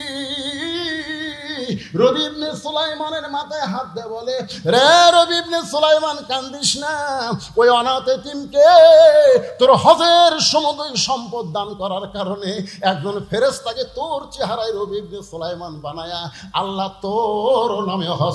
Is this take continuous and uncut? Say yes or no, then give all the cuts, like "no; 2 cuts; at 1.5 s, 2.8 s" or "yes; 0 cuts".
yes; 0 cuts